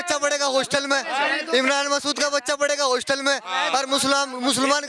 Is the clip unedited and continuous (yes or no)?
yes